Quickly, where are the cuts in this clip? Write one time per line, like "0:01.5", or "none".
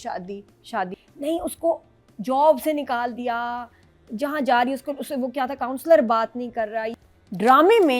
0:01.0
0:07.0